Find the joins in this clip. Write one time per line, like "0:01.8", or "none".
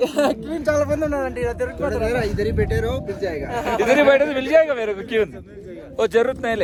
none